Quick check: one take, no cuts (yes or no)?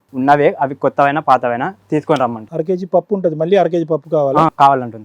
yes